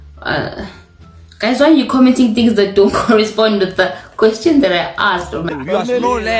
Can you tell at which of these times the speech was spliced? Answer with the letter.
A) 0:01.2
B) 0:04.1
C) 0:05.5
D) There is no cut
C